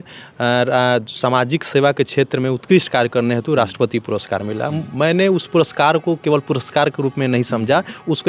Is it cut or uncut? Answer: uncut